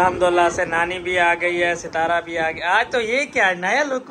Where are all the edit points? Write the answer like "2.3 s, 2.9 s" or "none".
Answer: none